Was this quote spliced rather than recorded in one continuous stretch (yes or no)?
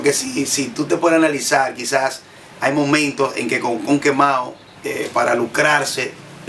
no